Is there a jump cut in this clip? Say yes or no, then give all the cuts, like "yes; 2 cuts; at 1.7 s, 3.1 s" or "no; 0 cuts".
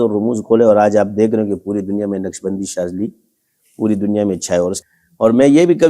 yes; 1 cut; at 4.8 s